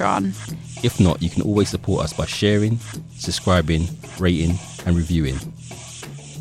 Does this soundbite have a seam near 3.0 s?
no; 1 cut; at 5.4 s

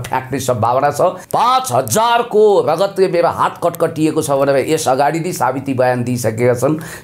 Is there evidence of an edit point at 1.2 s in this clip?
yes; 1 cut; at 1.2 s

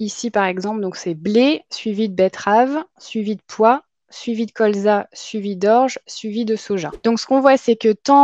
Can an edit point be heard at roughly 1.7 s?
no; 1 cut; at 6.9 s

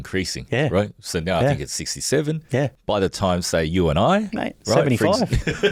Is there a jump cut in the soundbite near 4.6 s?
no; 0 cuts

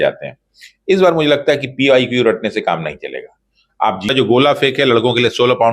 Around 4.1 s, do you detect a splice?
yes; 1 cut; at 4.1 s

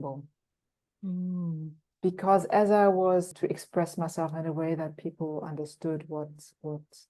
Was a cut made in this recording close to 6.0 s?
no; 1 cut; at 3.3 s

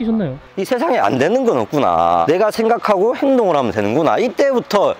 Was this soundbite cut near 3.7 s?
no; 1 cut; at 2.2 s

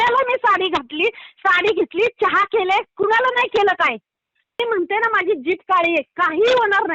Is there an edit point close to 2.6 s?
no; 1 cut; at 4.6 s

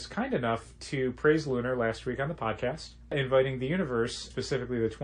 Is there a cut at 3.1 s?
yes; 1 cut; at 3.1 s

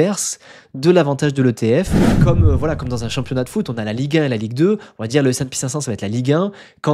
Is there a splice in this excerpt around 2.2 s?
yes; 1 cut; at 2.2 s

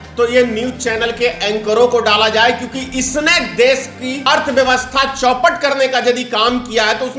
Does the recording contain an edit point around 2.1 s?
no; 1 cut; at 4.2 s

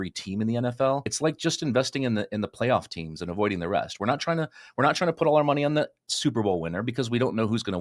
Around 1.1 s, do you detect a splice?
yes; 1 cut; at 1.1 s

